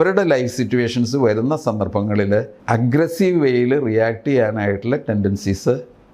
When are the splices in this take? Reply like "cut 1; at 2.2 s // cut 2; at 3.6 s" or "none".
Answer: cut 1; at 2.5 s

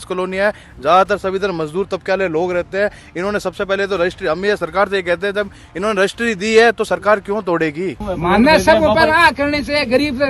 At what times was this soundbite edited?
cut 1; at 8.1 s

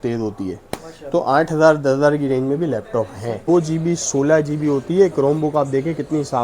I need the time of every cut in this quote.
cut 1; at 3.5 s

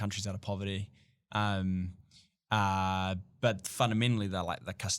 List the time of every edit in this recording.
none

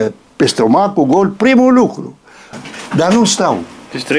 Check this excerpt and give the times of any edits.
cut 1; at 2.4 s

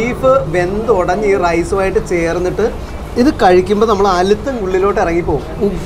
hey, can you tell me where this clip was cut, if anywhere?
none

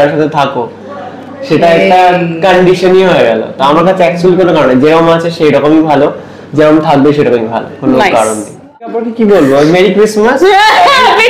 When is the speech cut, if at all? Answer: cut 1; at 9.0 s

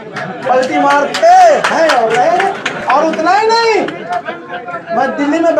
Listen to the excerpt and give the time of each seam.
none

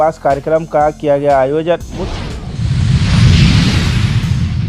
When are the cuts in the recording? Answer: cut 1; at 2.0 s

